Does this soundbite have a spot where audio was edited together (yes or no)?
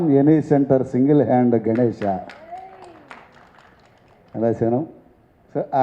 no